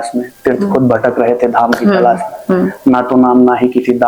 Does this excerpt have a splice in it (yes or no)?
no